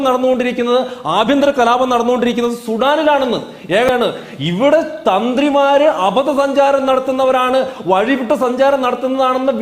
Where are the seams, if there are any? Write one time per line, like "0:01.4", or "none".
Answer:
0:03.9